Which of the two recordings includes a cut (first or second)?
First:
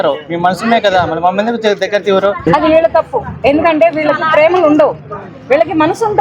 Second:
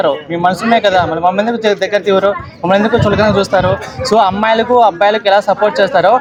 first